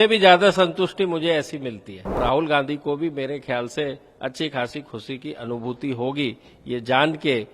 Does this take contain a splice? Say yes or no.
yes